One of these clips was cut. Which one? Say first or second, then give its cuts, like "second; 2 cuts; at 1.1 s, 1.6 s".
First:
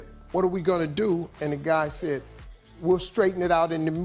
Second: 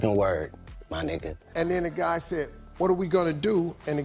second; 1 cut; at 1.5 s